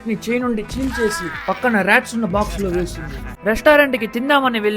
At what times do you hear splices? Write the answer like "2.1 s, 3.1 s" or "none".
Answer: 3.2 s